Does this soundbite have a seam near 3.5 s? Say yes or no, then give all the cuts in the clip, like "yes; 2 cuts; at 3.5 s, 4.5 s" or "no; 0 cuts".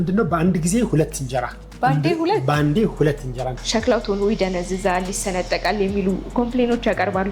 yes; 1 cut; at 3.5 s